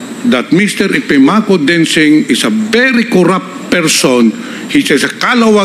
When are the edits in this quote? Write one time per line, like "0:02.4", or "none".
none